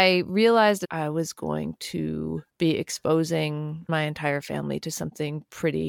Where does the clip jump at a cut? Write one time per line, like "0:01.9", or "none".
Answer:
0:00.9
0:02.5
0:03.9